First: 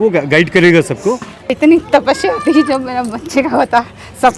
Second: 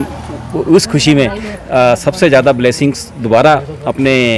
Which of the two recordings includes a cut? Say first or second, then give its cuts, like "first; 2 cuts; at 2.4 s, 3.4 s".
first; 1 cut; at 1.6 s